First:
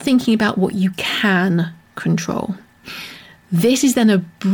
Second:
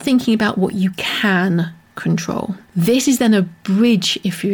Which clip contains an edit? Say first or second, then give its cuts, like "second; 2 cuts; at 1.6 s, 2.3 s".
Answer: second; 1 cut; at 2.6 s